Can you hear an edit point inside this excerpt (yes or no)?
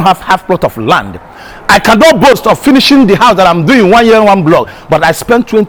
no